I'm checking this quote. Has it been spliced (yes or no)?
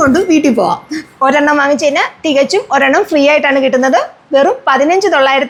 no